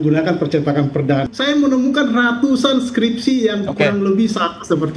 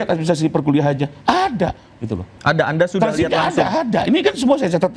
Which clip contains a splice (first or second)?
first